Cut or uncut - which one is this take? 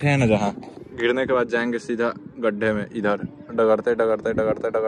uncut